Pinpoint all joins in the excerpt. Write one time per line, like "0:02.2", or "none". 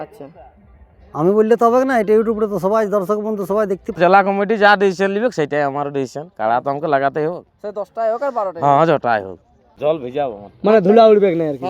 0:04.0
0:09.6